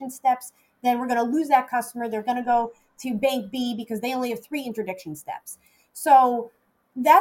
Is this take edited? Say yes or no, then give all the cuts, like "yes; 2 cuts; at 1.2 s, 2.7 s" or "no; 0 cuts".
no; 0 cuts